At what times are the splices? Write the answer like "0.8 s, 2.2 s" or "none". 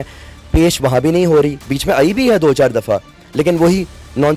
none